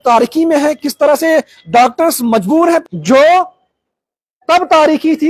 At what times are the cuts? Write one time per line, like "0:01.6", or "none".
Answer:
0:02.8